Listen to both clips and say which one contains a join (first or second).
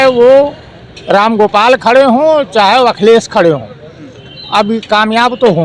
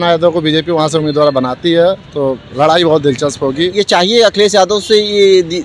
second